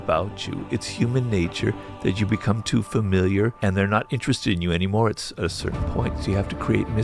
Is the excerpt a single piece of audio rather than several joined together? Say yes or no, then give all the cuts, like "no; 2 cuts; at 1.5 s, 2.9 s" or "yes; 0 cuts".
no; 1 cut; at 3.6 s